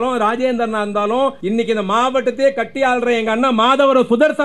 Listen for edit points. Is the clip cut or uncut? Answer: cut